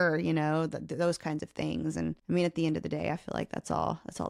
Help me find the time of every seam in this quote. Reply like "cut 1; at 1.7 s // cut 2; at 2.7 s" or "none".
cut 1; at 2.2 s